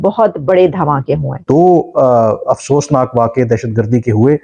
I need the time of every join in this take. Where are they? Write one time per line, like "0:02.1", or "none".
0:01.4